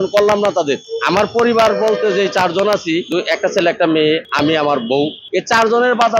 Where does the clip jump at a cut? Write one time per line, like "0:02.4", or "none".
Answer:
0:00.9
0:03.1
0:04.3
0:05.2